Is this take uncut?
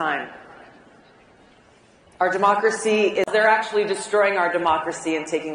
yes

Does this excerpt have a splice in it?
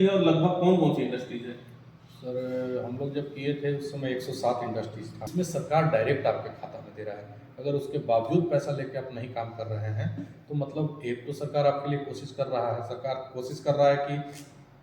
yes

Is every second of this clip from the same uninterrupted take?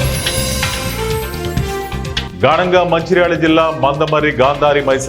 no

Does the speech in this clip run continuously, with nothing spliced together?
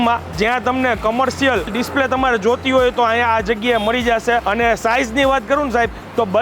yes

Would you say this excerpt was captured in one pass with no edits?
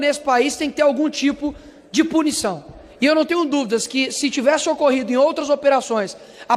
yes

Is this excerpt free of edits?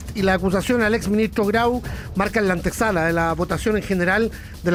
yes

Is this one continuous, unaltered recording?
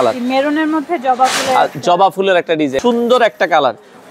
no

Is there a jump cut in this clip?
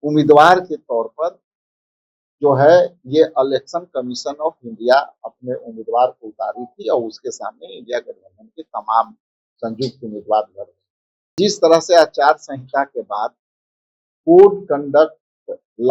yes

